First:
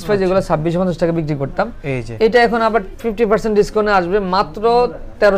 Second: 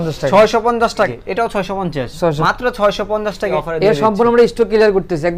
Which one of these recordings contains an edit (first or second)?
second